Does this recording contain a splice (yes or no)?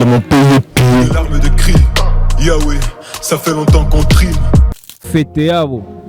yes